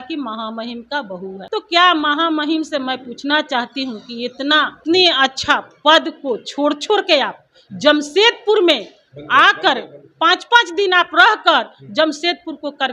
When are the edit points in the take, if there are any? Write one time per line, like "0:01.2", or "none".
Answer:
0:01.4
0:04.8